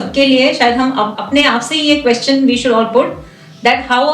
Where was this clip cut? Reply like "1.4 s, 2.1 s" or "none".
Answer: 1.2 s